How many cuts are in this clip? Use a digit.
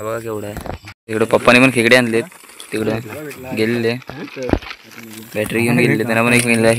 1